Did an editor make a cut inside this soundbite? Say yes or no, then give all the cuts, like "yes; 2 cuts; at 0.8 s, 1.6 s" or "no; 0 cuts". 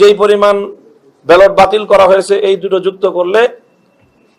no; 0 cuts